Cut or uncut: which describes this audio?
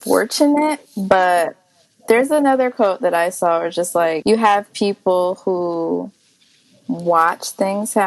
cut